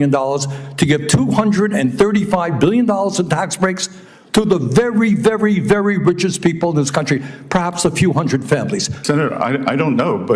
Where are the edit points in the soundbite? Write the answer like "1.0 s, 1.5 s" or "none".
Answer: 8.9 s